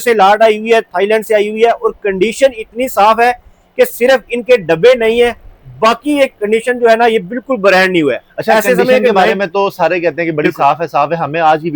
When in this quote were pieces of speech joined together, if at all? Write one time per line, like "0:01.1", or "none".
none